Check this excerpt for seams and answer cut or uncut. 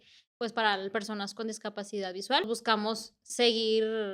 cut